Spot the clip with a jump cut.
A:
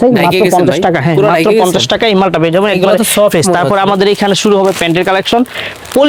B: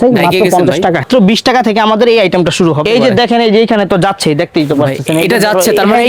B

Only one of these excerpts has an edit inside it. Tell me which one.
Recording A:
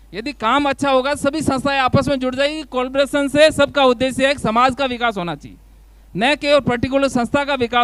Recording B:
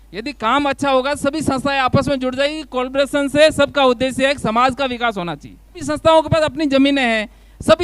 B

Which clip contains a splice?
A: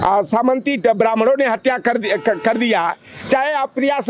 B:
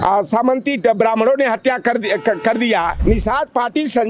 B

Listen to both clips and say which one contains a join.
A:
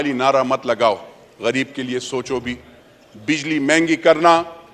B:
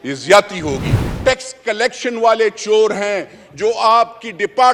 B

